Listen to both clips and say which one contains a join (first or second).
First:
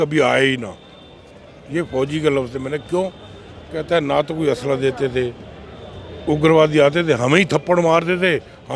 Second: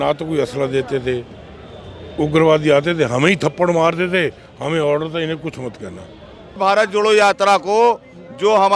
second